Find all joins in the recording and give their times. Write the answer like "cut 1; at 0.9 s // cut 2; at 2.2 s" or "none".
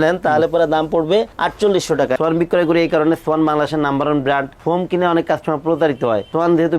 cut 1; at 2.2 s